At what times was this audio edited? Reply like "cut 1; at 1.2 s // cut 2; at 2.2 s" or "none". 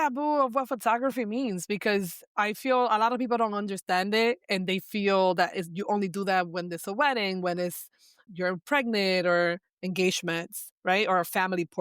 cut 1; at 2.2 s // cut 2; at 8.2 s